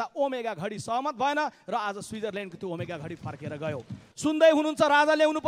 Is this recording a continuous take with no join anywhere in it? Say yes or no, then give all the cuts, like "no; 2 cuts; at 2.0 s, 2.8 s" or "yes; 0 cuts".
no; 1 cut; at 4.0 s